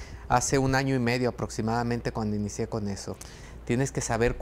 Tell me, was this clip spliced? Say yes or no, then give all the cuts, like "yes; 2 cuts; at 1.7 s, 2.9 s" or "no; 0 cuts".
yes; 1 cut; at 3.3 s